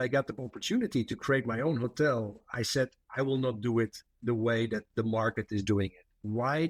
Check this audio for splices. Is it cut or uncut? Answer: uncut